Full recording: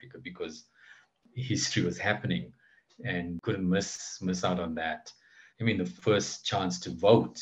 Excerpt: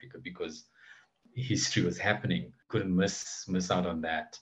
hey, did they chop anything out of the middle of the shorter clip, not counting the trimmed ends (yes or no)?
yes